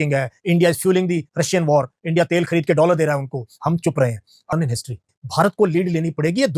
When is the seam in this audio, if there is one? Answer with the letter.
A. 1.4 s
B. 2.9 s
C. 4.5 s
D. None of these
C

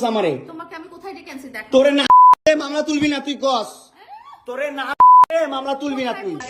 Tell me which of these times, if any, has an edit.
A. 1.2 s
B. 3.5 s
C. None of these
C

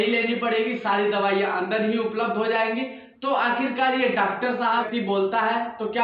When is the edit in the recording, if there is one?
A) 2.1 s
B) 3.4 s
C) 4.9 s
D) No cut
C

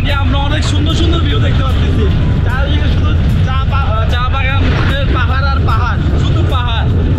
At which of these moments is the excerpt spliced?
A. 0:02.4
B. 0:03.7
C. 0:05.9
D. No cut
D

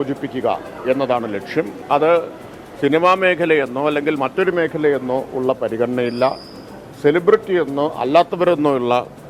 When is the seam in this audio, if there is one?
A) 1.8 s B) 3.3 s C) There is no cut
A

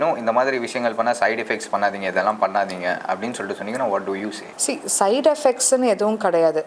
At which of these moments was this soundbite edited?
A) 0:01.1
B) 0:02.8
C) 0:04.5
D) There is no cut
C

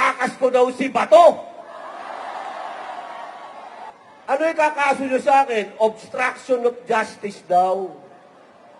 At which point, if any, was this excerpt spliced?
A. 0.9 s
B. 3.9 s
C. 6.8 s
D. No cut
B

